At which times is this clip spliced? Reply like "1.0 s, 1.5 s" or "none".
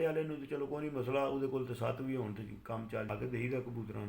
3.1 s

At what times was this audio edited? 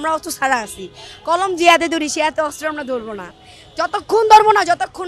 none

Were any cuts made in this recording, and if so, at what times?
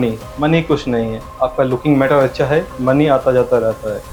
none

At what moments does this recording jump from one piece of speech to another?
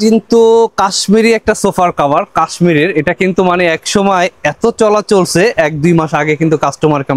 none

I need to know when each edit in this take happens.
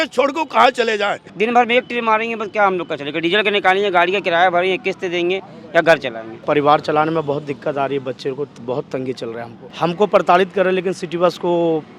1.2 s, 6.4 s, 9.6 s

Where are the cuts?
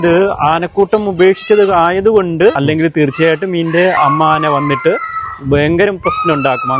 2.6 s, 4.0 s

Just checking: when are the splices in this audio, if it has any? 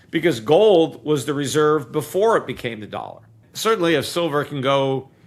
3.5 s

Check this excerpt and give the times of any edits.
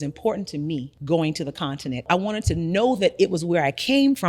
0.9 s, 2.0 s

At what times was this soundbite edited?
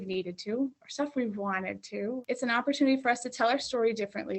2.2 s

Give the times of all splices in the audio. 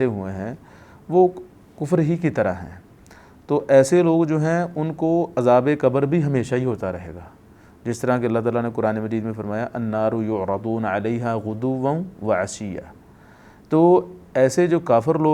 none

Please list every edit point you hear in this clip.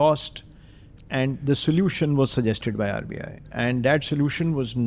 3.5 s

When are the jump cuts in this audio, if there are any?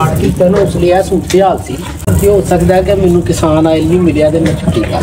2.0 s

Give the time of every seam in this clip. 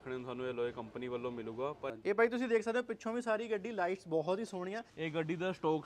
1.9 s, 4.9 s

